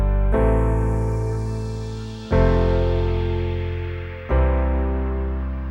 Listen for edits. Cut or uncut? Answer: uncut